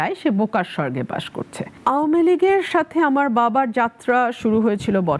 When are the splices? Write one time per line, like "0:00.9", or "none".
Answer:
0:01.7